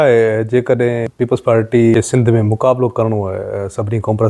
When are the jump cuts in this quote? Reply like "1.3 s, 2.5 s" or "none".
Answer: 1.1 s, 1.9 s